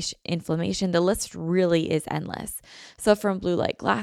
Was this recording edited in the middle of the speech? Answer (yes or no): no